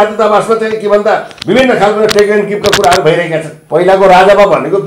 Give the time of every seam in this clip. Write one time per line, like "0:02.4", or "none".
0:03.6